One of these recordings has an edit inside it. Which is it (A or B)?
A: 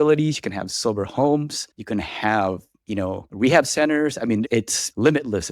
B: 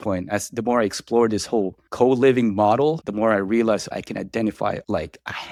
A